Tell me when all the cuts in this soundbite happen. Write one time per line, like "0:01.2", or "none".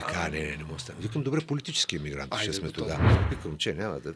0:03.1